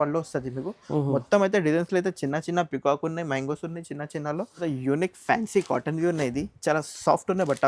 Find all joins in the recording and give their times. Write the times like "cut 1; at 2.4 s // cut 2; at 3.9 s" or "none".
cut 1; at 4.5 s

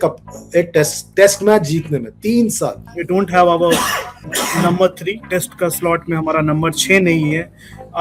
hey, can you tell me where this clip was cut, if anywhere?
cut 1; at 2.8 s // cut 2; at 4.2 s // cut 3; at 5.2 s

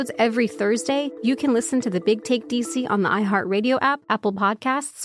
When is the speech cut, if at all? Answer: cut 1; at 1.1 s // cut 2; at 4.0 s

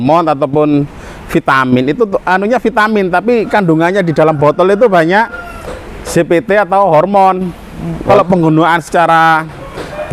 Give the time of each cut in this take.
cut 1; at 8.1 s

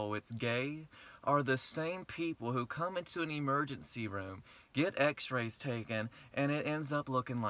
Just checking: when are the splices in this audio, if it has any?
none

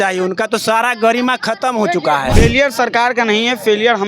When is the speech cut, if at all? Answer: cut 1; at 2.3 s

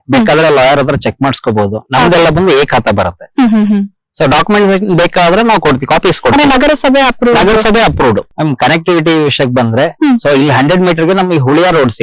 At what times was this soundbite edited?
cut 1; at 8.3 s

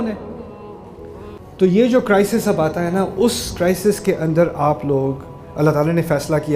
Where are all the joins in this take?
cut 1; at 1.4 s

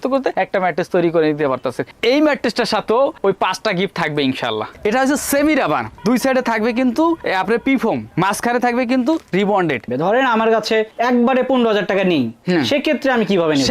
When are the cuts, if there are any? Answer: cut 1; at 4.8 s // cut 2; at 9.9 s

